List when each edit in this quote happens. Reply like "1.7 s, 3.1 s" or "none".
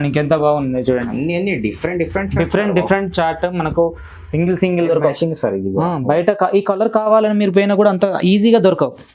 4.9 s